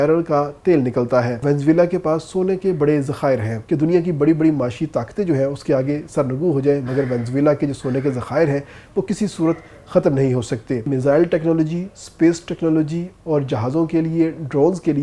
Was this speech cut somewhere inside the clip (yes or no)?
yes